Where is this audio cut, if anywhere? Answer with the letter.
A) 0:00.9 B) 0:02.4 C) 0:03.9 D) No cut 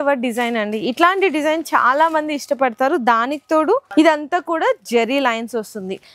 C